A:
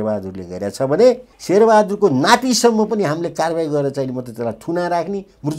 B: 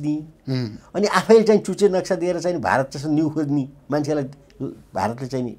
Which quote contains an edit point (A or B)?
A